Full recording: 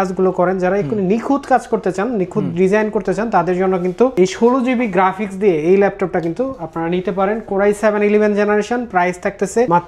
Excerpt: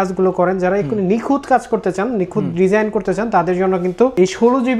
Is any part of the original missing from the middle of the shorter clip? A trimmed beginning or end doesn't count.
no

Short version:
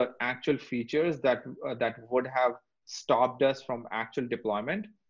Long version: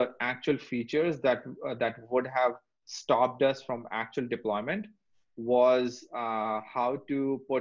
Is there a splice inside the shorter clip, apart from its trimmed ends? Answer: no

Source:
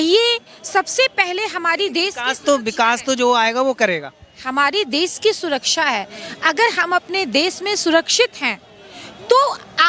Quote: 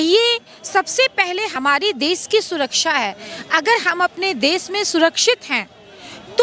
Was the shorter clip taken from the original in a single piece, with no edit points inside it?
no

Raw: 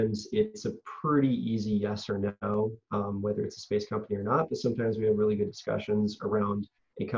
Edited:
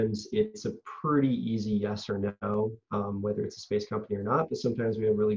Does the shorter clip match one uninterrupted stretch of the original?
yes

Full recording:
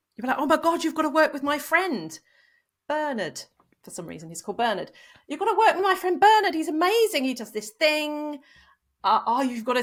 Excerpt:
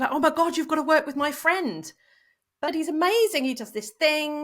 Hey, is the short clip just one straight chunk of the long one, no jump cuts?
no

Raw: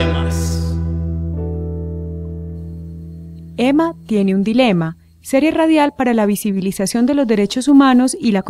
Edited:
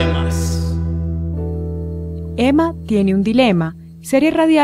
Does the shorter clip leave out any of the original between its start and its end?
yes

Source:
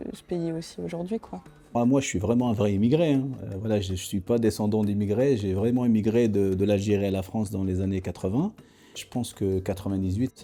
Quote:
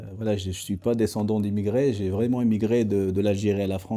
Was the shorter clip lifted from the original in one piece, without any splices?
yes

